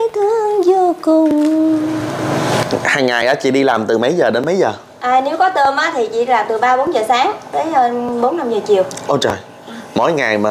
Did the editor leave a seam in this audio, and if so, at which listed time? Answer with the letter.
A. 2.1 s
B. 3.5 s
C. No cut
A